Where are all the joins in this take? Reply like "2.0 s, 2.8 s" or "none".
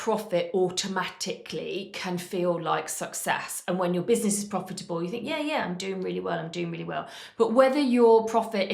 none